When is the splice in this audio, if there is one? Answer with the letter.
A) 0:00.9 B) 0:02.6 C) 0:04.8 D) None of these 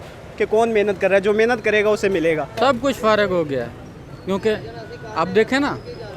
B